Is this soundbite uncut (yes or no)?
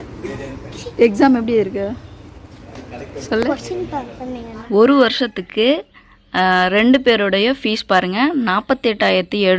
no